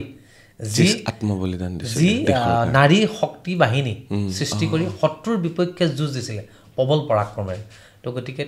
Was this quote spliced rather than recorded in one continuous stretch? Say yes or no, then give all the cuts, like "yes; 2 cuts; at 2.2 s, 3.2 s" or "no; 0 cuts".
no; 0 cuts